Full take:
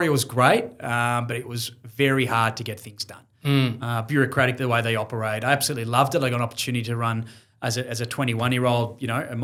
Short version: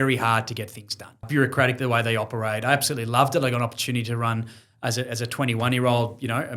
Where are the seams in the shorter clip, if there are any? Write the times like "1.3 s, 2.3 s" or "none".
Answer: 1.2 s